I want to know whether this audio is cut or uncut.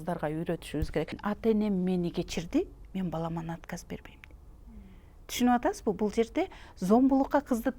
cut